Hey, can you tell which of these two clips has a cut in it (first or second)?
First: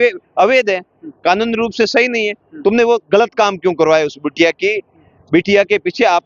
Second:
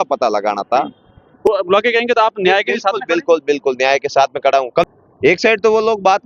second